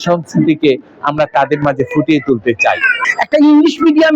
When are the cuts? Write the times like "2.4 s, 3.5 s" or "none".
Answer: 3.0 s